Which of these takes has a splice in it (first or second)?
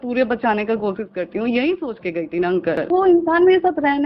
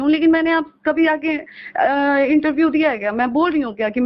first